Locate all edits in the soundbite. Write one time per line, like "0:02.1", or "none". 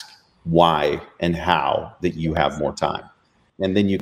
none